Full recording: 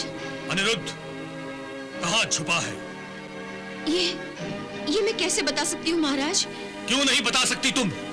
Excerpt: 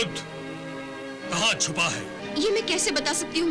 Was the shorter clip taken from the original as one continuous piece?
no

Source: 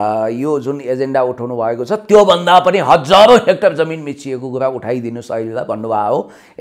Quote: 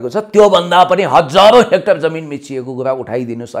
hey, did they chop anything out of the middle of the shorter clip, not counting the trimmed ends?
no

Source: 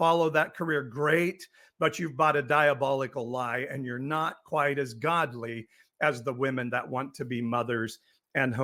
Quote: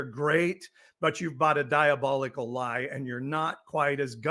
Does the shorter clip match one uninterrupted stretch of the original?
yes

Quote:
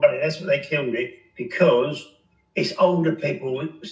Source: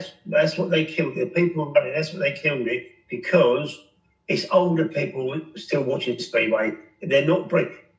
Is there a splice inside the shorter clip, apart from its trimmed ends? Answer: no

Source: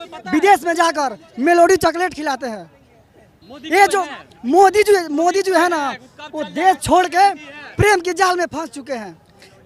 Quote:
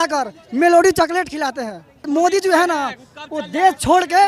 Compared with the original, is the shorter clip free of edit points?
no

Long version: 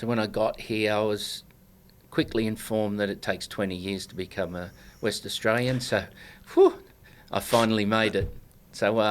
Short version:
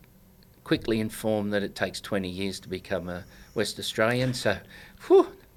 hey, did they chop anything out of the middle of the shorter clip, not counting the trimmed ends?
no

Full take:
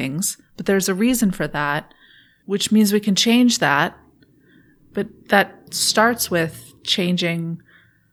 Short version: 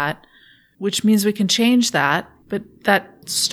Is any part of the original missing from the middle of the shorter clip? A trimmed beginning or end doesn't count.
yes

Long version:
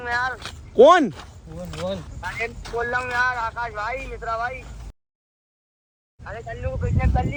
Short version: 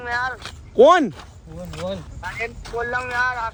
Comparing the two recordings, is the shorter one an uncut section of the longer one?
yes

